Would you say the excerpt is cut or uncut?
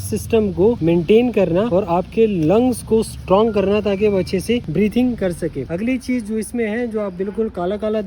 uncut